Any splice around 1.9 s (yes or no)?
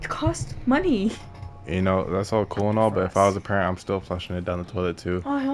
no